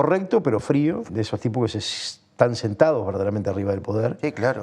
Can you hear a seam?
yes; 1 cut; at 1.1 s

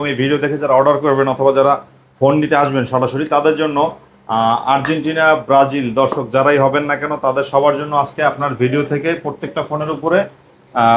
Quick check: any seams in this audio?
no; 0 cuts

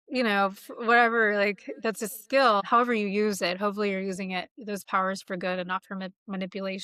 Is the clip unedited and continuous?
no; 1 cut; at 2.7 s

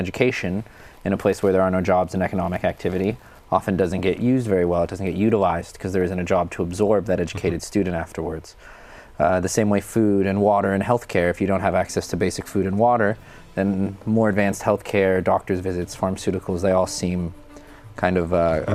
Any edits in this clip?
no; 0 cuts

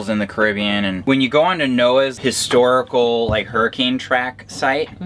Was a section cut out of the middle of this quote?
yes; 2 cuts; at 1.0 s, 2.1 s

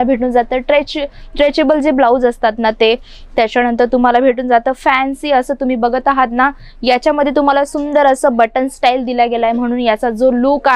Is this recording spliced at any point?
no; 0 cuts

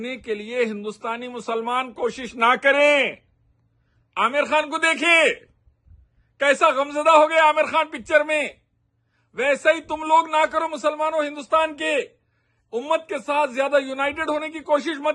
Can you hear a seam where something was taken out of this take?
no; 0 cuts

